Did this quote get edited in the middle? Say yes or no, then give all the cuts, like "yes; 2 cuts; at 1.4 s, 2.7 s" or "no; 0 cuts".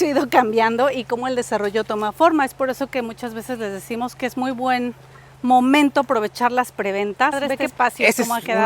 yes; 1 cut; at 7.6 s